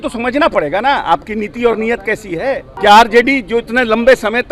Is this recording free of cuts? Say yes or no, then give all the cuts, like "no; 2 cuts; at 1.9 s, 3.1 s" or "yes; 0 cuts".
no; 1 cut; at 2.7 s